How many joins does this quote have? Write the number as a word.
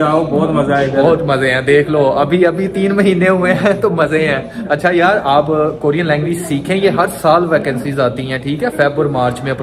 zero